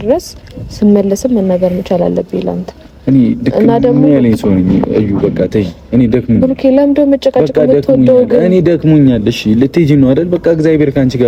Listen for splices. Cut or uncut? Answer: uncut